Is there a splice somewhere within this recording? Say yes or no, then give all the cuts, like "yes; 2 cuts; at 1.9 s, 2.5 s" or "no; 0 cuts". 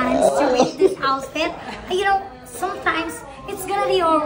no; 0 cuts